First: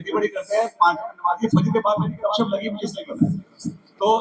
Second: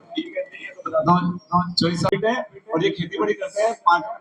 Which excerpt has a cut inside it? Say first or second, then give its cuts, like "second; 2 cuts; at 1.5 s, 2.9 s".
second; 1 cut; at 2.1 s